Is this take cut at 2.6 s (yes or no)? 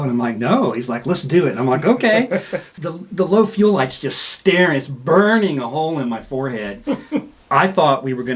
yes